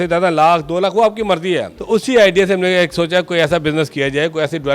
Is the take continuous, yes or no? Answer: no